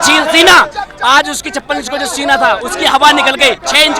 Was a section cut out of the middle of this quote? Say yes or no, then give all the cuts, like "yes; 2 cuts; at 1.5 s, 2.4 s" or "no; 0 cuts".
no; 0 cuts